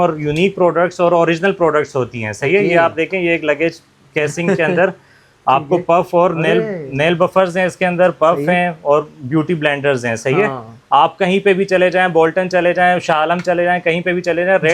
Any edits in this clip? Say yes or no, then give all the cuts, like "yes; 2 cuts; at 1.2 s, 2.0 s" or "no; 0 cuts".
no; 0 cuts